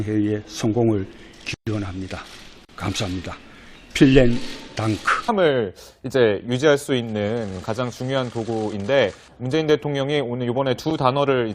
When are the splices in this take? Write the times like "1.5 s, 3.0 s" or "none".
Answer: none